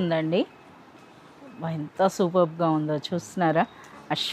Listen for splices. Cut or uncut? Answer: uncut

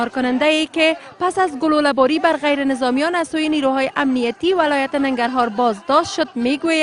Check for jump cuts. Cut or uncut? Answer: cut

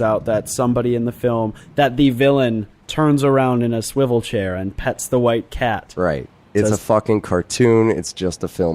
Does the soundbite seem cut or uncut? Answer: cut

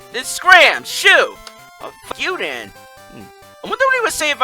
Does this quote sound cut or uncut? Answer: cut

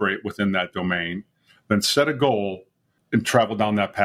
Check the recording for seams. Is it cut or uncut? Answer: uncut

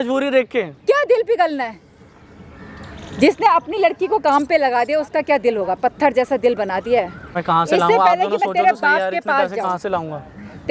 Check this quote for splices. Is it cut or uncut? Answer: uncut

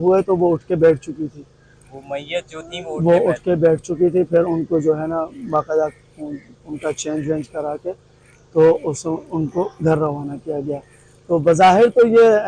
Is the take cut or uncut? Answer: uncut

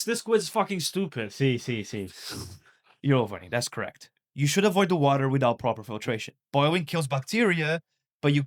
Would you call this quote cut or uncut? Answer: uncut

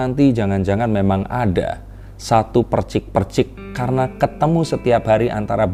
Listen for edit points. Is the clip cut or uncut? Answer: uncut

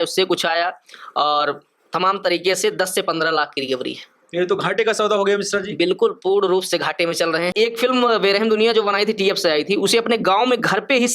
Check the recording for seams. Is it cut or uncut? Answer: cut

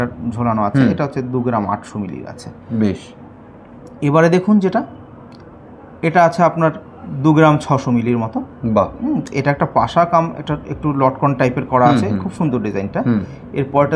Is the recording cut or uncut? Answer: uncut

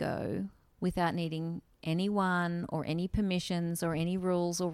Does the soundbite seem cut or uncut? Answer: uncut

